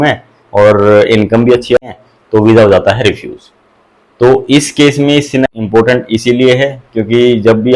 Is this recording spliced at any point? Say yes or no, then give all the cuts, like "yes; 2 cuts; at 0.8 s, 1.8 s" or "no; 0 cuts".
yes; 2 cuts; at 1.8 s, 5.4 s